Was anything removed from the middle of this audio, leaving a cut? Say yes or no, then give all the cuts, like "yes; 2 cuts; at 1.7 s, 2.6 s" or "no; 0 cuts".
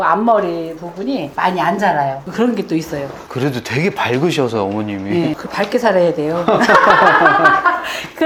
no; 0 cuts